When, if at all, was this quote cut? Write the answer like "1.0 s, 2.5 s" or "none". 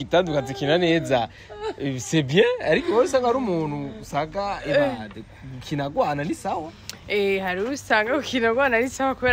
none